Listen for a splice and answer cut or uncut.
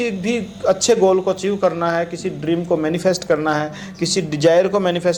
uncut